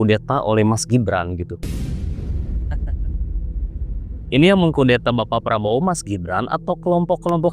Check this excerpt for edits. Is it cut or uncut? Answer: uncut